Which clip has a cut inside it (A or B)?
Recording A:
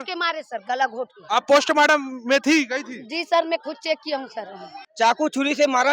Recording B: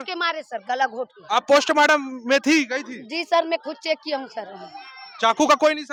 A